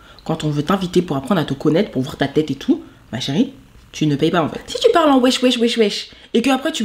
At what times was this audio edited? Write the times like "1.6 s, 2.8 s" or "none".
4.6 s